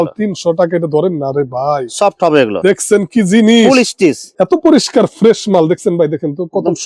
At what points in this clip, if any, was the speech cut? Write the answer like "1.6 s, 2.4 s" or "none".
4.3 s